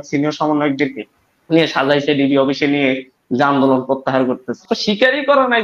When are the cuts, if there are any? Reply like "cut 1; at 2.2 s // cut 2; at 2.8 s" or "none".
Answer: cut 1; at 4.6 s